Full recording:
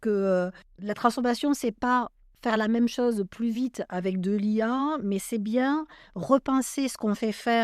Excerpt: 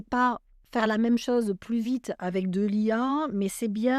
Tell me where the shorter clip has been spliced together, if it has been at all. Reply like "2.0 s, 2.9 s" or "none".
none